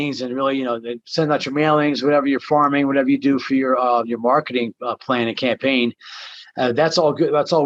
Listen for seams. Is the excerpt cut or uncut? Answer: uncut